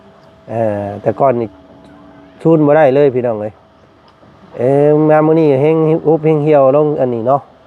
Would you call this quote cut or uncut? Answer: uncut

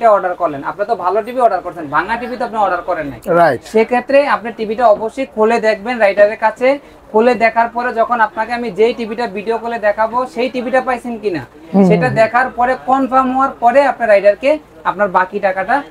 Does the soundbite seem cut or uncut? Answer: uncut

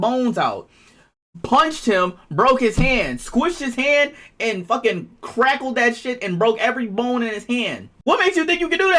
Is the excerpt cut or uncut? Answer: cut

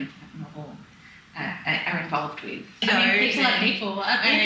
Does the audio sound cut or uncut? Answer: cut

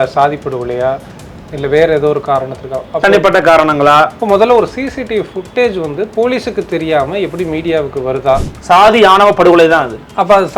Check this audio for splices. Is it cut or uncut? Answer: cut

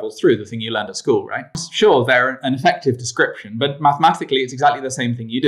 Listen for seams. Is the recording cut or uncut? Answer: cut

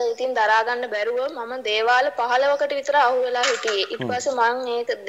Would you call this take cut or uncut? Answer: uncut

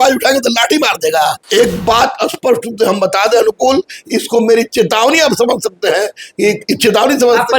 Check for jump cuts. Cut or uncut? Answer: cut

